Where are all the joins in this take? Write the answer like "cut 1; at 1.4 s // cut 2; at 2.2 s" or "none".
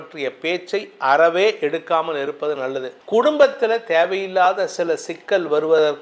cut 1; at 2.9 s